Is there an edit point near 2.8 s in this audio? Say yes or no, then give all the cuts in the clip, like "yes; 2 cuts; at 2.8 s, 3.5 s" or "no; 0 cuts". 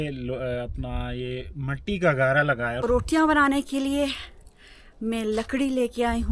yes; 1 cut; at 2.8 s